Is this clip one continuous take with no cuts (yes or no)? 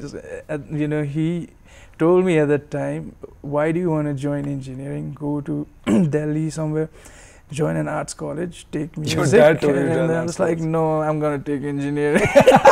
yes